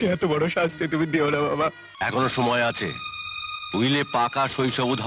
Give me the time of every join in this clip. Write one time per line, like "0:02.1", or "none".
0:01.9

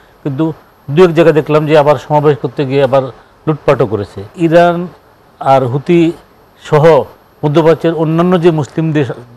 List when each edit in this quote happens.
0:04.3

